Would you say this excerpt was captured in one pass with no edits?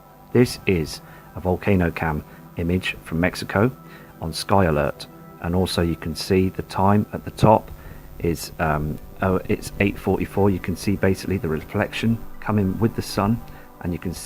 no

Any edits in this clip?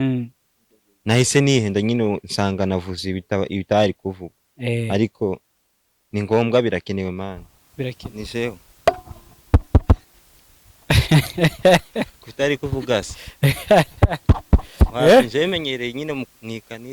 yes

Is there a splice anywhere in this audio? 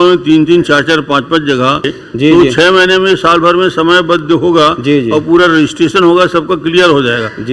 yes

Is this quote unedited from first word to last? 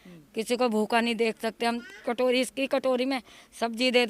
yes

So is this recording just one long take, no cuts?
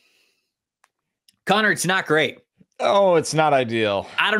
yes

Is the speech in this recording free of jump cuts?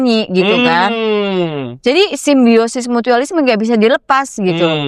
yes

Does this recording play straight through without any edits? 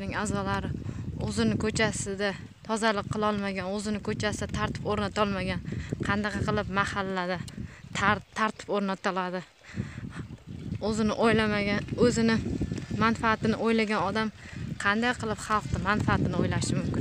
yes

